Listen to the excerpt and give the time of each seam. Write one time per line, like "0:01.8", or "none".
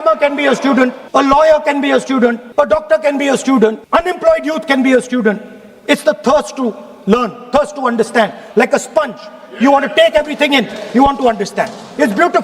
0:01.0
0:02.4
0:03.8